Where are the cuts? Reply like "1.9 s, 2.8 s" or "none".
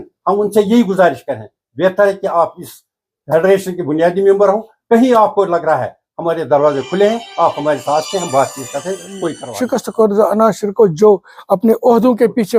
9.5 s